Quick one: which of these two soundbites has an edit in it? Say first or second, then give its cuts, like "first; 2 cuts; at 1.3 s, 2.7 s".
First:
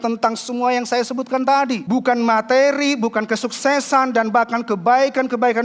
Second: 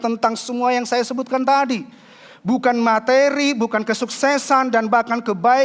first; 1 cut; at 1.8 s